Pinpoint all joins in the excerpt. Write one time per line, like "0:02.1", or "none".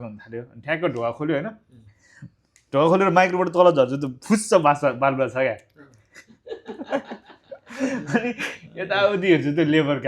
none